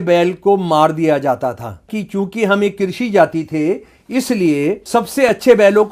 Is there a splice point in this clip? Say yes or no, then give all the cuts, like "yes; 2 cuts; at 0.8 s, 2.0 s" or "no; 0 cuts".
yes; 2 cuts; at 2.0 s, 4.8 s